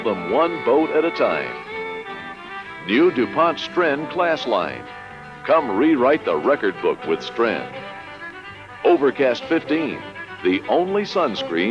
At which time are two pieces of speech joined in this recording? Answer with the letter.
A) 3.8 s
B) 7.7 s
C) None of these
B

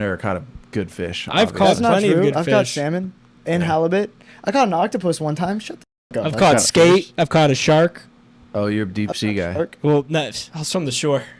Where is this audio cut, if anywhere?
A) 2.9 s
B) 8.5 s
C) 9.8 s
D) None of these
D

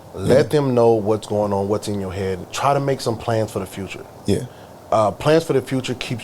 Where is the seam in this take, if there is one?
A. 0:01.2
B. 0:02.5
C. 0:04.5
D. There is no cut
B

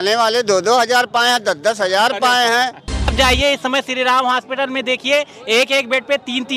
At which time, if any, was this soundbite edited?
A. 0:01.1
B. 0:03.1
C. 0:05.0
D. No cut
B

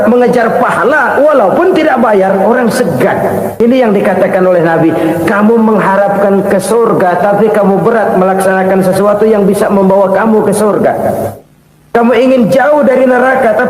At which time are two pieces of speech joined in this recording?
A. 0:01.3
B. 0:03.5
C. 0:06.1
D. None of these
B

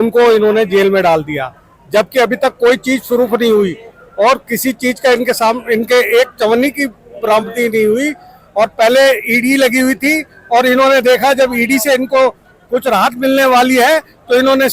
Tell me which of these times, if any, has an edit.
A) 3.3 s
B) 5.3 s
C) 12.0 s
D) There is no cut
D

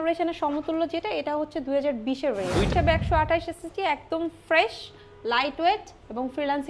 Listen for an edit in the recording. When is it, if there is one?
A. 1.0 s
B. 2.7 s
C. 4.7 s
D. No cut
B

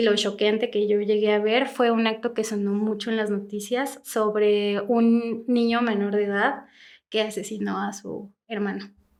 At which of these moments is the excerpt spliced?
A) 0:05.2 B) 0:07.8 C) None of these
C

